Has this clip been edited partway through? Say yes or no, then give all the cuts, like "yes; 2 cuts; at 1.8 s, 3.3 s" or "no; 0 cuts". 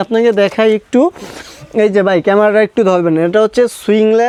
no; 0 cuts